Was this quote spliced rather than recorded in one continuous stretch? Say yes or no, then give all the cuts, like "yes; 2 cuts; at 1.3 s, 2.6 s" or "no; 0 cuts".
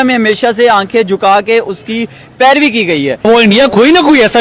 yes; 1 cut; at 3.3 s